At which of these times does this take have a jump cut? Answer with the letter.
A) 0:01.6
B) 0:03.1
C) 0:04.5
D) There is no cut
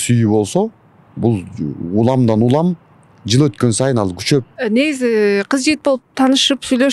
C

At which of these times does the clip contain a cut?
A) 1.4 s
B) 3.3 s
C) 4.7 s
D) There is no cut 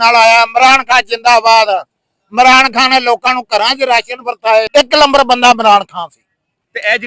C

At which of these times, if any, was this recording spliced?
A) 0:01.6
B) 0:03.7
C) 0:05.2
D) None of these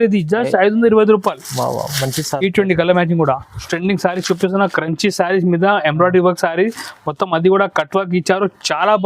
B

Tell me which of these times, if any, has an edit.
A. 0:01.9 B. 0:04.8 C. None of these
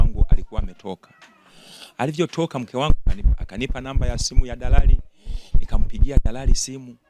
C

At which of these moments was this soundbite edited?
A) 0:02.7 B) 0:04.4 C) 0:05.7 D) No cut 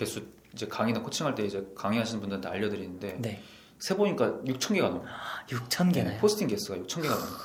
D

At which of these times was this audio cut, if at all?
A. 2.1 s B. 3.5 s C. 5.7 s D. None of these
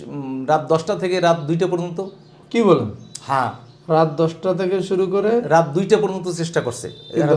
D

